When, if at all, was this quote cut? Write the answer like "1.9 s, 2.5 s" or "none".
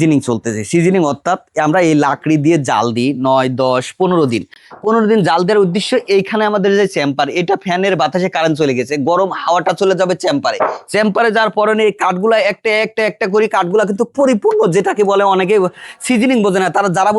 none